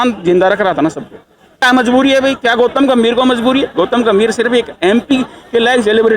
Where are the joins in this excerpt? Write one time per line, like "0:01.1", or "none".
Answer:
0:01.6